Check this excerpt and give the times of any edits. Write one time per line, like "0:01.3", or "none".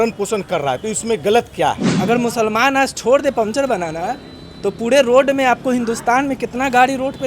0:01.9